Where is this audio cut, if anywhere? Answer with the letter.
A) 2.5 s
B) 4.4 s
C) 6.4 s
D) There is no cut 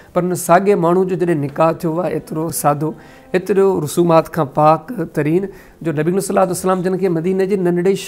A